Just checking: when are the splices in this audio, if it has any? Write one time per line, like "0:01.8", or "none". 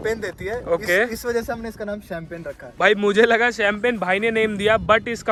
none